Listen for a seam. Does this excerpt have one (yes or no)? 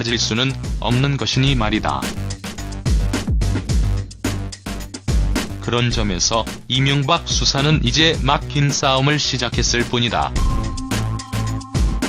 yes